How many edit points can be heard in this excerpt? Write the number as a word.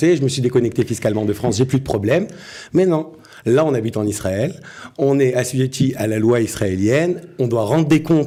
zero